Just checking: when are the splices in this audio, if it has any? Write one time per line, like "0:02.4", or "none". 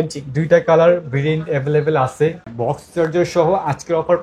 0:02.5